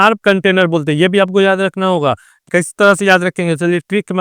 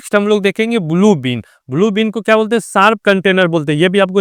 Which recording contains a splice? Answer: first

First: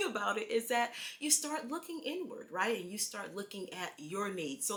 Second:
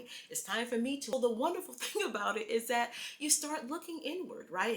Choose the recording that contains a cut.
second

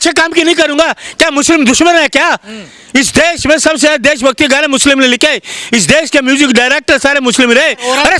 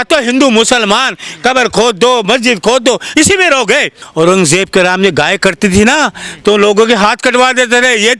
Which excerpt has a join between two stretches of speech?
second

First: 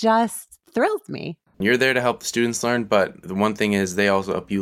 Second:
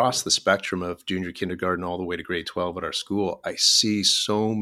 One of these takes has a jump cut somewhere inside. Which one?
first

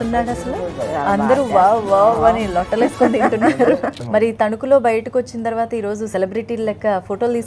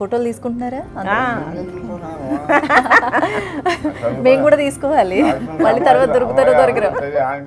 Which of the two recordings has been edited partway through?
first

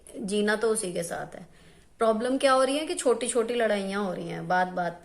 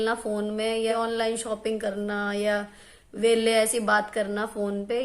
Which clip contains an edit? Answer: second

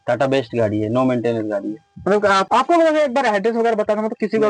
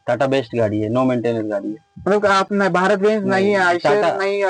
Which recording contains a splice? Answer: first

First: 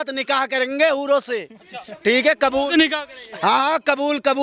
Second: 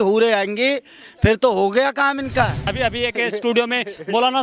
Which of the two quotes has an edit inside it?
second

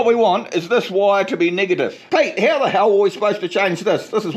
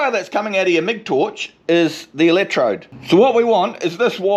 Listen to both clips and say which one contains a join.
first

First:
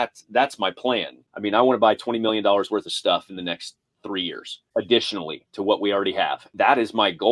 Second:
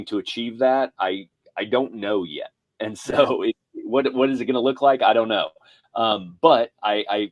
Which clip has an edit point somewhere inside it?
first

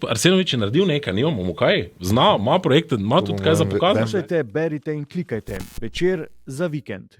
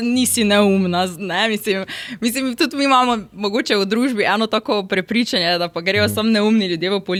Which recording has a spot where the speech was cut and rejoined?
first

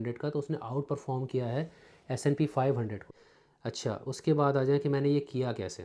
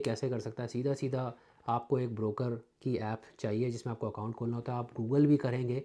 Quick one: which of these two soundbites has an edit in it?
first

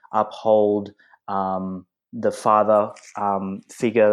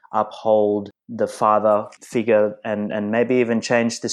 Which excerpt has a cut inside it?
second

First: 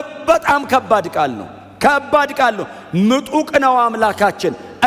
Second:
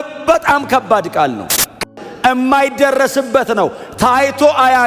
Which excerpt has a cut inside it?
second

